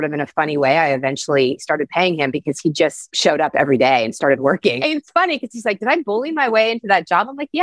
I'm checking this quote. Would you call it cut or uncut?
cut